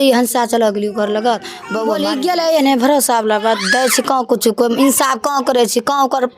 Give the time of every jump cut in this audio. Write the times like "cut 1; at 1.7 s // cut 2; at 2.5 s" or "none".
cut 1; at 2.0 s